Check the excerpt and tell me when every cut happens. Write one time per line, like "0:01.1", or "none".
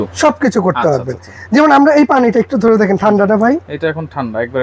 none